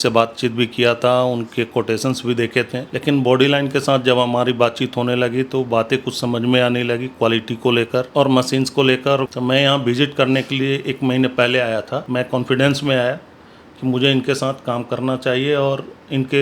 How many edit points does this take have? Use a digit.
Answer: 4